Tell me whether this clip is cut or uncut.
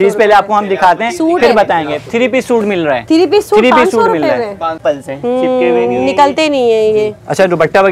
cut